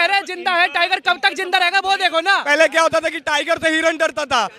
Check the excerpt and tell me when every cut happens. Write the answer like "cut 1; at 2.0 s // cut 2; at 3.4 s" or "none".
cut 1; at 2.4 s